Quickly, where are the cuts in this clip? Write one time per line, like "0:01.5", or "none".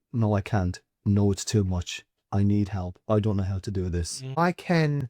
0:04.2